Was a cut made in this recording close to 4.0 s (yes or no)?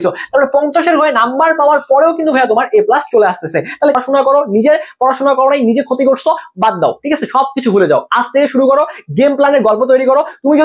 yes